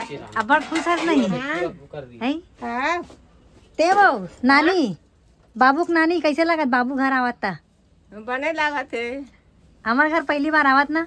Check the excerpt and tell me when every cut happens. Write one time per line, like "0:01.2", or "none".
none